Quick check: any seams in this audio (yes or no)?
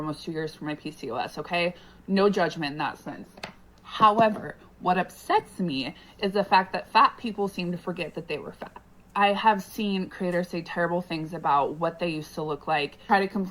yes